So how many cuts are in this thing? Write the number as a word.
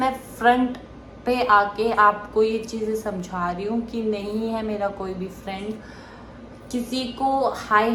zero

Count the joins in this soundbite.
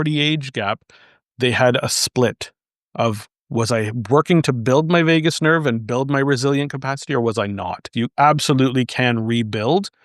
one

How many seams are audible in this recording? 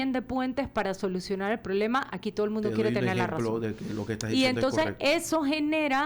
zero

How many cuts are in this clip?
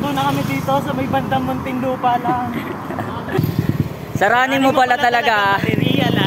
one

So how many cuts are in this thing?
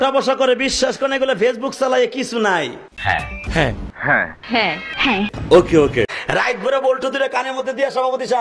zero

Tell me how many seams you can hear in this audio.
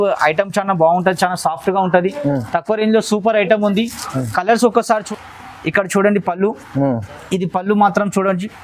one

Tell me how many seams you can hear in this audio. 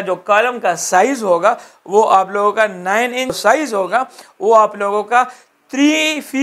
one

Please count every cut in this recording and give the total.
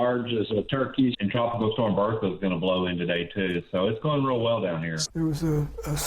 two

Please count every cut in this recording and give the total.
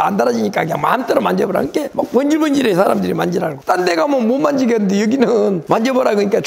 zero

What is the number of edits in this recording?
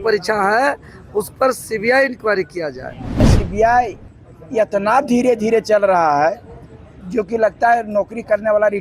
one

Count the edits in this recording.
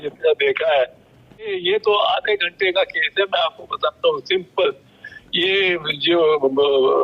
one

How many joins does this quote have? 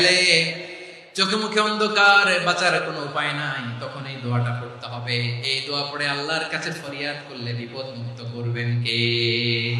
zero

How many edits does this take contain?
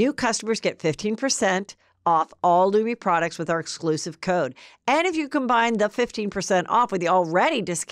zero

